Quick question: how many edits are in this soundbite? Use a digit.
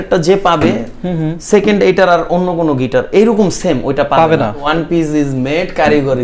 1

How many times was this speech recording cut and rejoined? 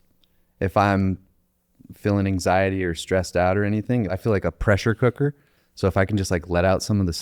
1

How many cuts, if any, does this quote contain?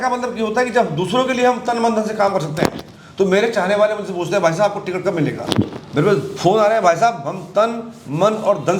0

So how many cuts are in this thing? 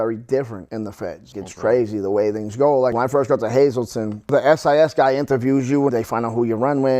4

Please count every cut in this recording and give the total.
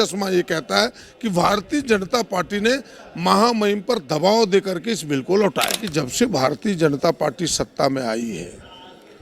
1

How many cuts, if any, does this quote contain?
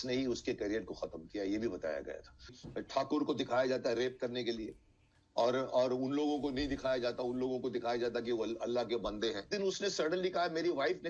2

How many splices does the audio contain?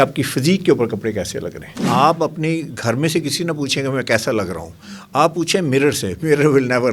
1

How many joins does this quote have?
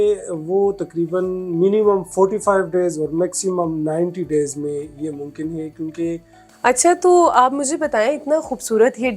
1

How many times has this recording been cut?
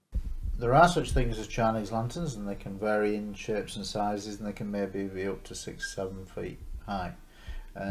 1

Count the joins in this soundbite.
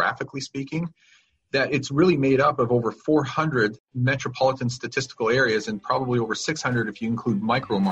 1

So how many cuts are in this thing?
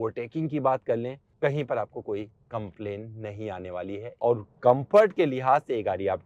2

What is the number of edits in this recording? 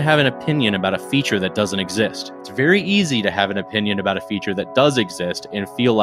0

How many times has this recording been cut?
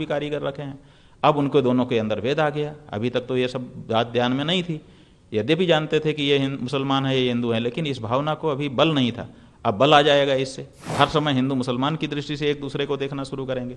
1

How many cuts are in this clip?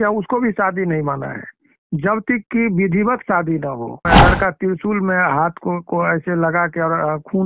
1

